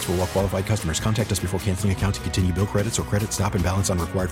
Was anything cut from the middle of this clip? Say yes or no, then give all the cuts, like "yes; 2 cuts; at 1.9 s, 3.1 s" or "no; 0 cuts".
no; 0 cuts